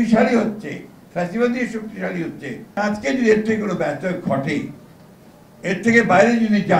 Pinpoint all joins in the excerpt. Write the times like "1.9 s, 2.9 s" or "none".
2.8 s